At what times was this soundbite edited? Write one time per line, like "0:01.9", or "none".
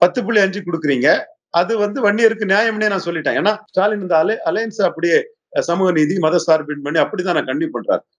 0:03.6